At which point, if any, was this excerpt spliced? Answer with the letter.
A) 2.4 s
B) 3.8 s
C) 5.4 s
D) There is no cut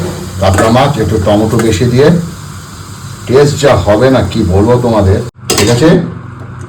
C